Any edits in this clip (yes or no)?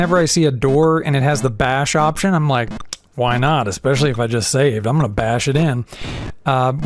no